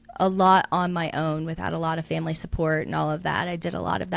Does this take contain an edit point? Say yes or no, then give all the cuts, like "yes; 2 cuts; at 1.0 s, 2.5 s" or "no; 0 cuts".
no; 0 cuts